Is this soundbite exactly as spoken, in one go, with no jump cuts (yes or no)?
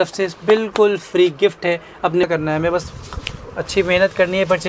no